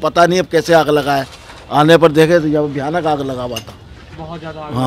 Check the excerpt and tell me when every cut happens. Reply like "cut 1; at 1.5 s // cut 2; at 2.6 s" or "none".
none